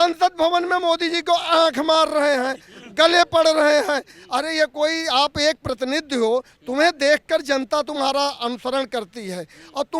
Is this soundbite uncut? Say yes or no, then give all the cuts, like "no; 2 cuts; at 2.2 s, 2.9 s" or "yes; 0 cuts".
yes; 0 cuts